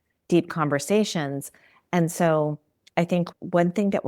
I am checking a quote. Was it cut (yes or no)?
no